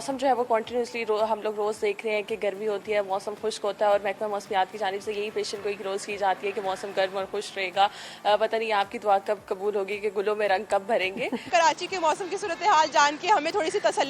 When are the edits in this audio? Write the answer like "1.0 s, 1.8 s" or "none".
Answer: 11.4 s